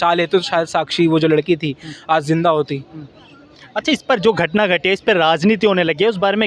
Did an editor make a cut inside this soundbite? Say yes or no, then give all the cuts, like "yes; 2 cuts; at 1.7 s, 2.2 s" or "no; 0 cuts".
no; 0 cuts